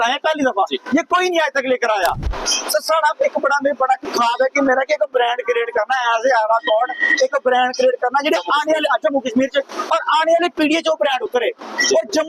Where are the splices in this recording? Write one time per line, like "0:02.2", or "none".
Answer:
0:02.3